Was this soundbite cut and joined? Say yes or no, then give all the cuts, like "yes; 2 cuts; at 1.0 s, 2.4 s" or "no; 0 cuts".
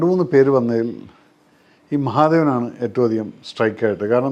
no; 0 cuts